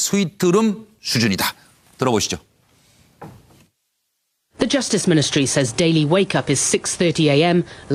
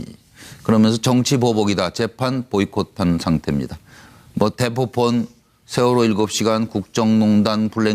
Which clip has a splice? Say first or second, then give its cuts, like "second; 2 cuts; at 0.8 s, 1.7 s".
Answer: second; 1 cut; at 3.7 s